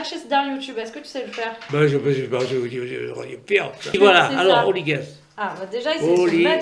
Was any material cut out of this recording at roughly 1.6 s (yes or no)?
no